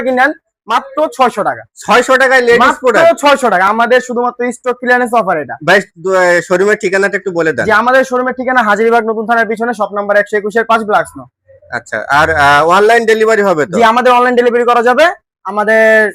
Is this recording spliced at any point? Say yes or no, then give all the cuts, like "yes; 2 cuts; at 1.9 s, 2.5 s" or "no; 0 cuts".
no; 0 cuts